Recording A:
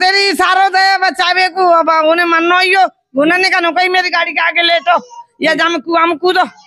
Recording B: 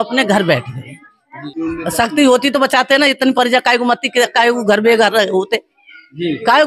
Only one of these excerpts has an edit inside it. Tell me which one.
B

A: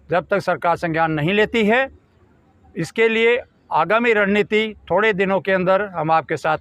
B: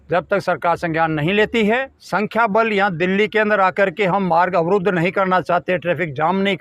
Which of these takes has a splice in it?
B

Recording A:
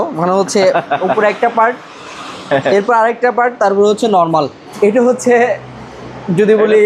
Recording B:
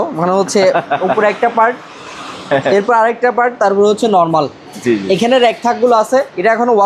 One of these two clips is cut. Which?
A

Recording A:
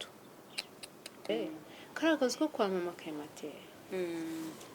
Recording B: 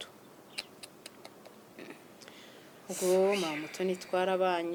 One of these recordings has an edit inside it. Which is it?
A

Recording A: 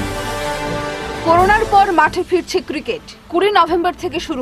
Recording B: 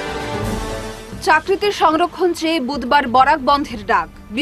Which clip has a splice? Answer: A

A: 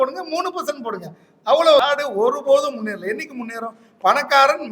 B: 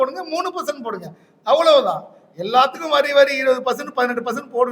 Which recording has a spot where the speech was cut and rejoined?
A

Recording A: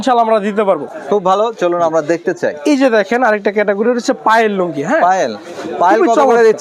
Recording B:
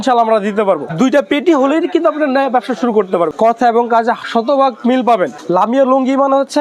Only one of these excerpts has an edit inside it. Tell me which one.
B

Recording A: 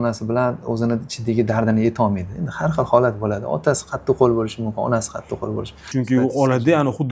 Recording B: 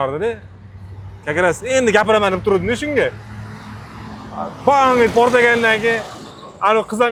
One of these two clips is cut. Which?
A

